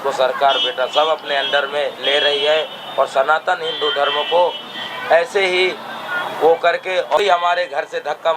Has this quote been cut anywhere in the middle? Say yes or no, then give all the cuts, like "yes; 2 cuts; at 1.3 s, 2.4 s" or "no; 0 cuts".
yes; 1 cut; at 7.2 s